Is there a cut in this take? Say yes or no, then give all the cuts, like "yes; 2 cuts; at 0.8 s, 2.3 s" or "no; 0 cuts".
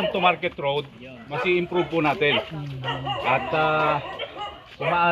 no; 0 cuts